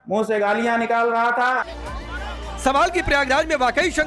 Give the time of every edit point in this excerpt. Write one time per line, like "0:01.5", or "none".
none